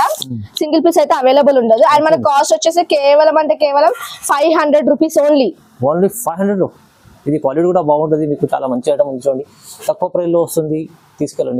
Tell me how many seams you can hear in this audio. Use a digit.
0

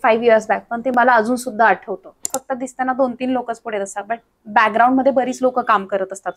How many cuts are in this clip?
1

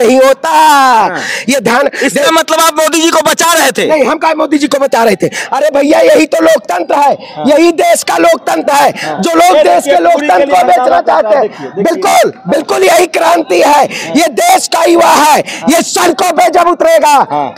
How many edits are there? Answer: 0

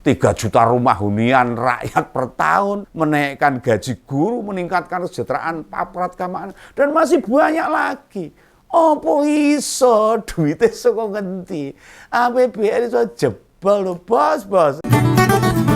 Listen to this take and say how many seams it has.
1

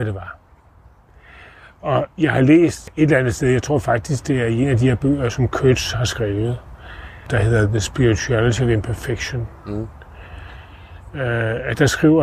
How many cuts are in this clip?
2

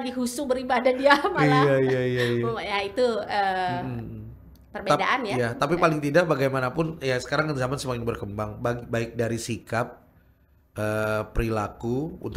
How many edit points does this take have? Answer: 0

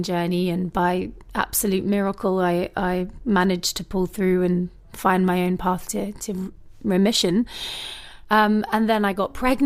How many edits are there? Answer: 0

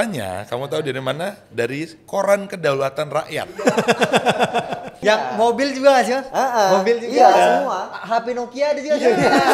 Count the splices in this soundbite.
1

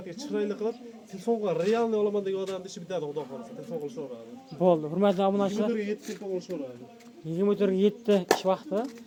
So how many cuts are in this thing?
0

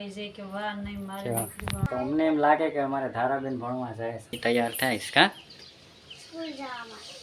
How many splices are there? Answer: 2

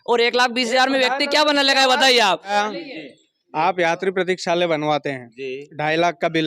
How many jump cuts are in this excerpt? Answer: 1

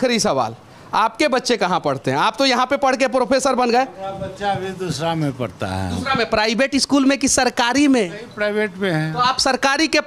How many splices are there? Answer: 0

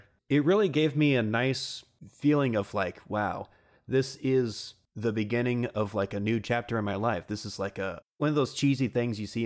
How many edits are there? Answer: 1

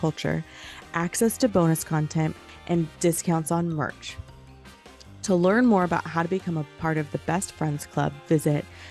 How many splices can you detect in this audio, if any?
1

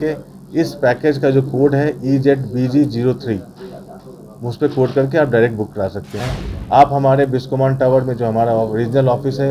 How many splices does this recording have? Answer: 1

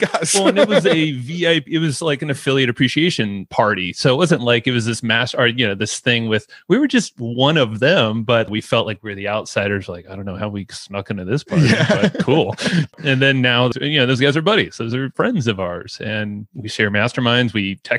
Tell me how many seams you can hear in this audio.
3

